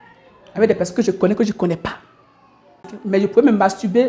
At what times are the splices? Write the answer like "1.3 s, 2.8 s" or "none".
2.9 s